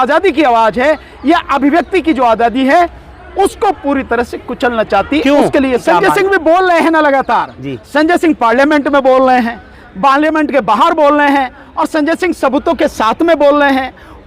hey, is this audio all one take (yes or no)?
no